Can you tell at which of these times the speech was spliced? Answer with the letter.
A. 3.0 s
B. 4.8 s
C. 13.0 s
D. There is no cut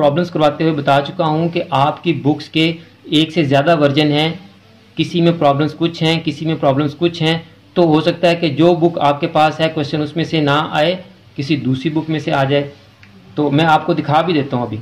D